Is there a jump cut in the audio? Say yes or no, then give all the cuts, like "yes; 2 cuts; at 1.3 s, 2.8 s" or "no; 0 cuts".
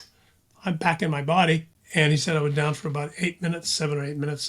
yes; 1 cut; at 1.8 s